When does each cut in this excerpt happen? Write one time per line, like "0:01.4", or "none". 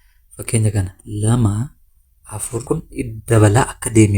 0:02.6